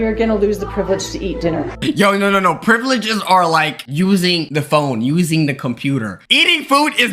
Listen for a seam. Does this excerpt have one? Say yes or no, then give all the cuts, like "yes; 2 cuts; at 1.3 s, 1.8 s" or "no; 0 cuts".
yes; 2 cuts; at 1.8 s, 6.2 s